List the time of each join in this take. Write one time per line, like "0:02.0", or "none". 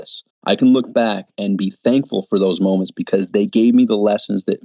0:01.3